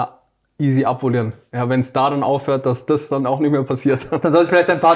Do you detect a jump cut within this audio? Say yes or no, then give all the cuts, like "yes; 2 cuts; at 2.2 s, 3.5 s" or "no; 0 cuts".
no; 0 cuts